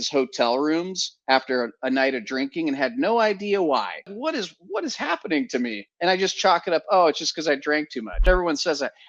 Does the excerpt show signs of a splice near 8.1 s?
yes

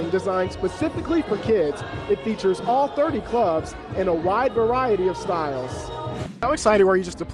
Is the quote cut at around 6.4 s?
yes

